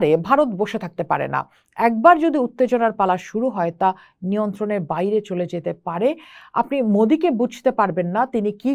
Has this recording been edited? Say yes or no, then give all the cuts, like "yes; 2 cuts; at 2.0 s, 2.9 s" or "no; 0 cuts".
no; 0 cuts